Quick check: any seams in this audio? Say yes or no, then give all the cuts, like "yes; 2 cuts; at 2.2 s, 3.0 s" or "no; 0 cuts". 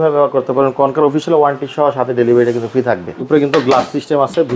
yes; 1 cut; at 3.2 s